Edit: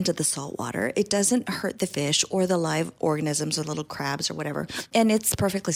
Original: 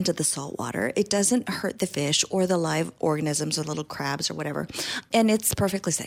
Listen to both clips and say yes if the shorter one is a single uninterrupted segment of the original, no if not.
no